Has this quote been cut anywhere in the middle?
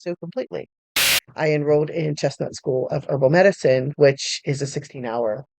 yes; 1 cut; at 1.0 s

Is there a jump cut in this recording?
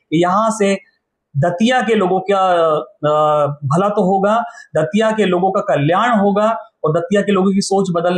no; 0 cuts

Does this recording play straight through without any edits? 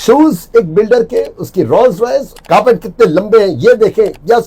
no; 1 cut; at 2.3 s

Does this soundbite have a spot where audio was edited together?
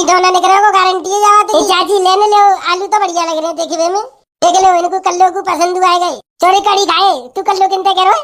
yes; 1 cut; at 1.5 s

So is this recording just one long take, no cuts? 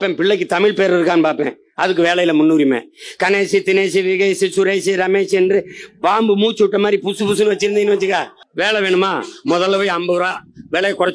no; 1 cut; at 8.4 s

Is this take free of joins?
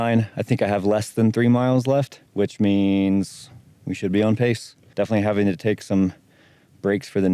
yes; 0 cuts

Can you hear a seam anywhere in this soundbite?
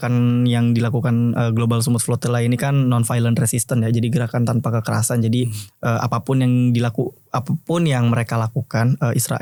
no; 0 cuts

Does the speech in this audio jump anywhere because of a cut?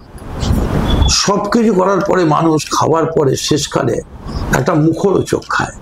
no; 0 cuts

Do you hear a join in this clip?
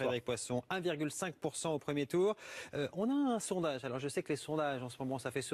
no; 0 cuts

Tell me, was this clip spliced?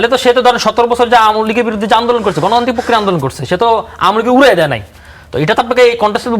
no; 0 cuts

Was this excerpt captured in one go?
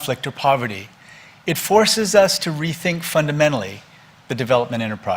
no; 1 cut; at 1.9 s

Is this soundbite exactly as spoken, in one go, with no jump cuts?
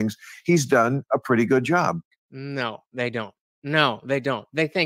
yes; 0 cuts

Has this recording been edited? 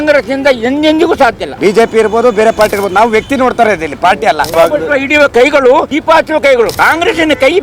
yes; 4 cuts; at 1.5 s, 4.5 s, 5.9 s, 6.7 s

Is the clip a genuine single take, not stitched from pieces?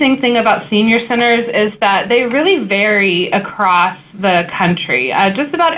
yes; 0 cuts

